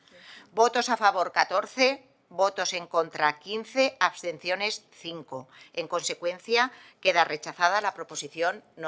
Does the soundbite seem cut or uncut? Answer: uncut